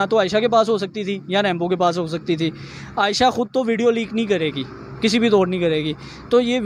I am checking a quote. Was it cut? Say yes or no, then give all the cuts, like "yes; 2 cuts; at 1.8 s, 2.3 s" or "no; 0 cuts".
no; 0 cuts